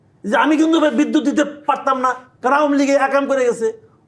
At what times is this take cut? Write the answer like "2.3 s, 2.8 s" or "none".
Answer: 2.3 s